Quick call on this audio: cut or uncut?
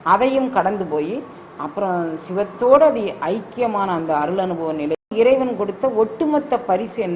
cut